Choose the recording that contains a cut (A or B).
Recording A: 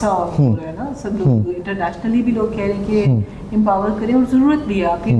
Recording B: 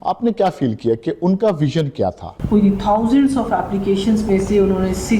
B